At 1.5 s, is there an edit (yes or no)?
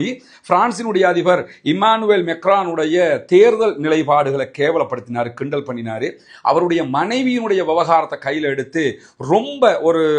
no